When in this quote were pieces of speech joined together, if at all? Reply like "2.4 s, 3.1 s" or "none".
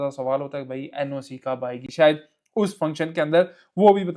none

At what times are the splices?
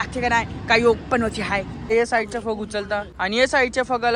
1.9 s, 3.1 s

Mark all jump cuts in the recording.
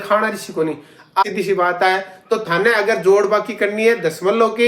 1.2 s

